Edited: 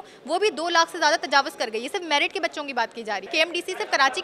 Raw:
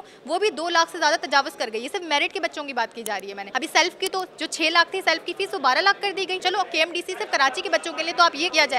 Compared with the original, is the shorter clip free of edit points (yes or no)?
no